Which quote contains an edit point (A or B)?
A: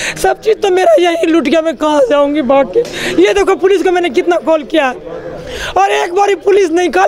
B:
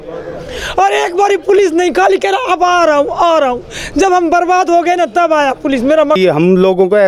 B